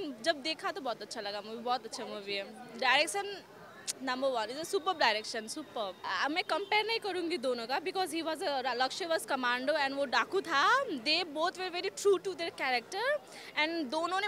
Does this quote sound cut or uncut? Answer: uncut